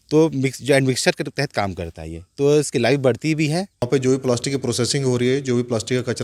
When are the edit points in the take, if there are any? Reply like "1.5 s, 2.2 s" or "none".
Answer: 3.9 s